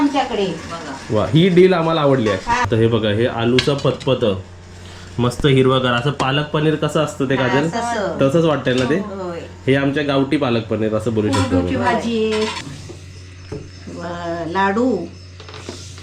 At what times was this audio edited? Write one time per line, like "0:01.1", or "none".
0:02.6
0:12.7

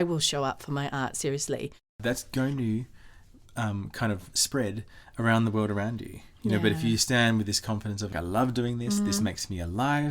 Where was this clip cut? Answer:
0:02.0
0:08.1

